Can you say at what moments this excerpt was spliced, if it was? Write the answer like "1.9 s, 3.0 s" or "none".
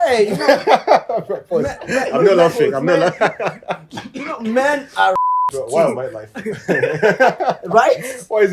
none